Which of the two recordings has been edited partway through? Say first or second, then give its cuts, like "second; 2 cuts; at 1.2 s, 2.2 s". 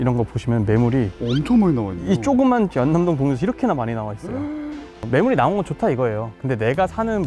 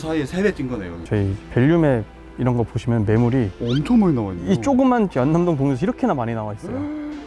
second; 1 cut; at 1.0 s